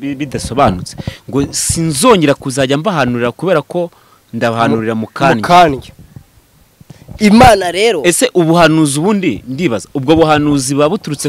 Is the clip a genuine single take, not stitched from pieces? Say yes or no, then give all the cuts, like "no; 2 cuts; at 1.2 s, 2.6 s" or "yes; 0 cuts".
yes; 0 cuts